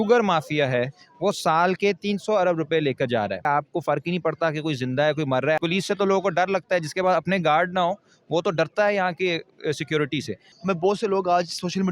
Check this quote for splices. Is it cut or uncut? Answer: cut